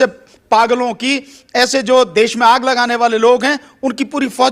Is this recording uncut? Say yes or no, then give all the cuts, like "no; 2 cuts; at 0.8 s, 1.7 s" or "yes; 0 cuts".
yes; 0 cuts